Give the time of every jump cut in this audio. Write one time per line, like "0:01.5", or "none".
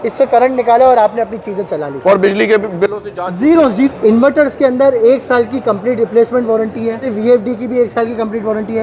0:03.9
0:07.1